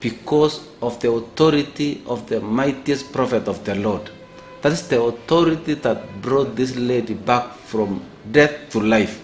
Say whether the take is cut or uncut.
uncut